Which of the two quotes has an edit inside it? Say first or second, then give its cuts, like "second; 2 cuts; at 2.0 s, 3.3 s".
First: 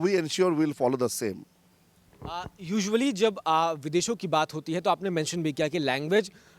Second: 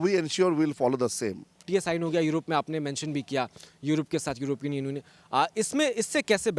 second; 1 cut; at 1.6 s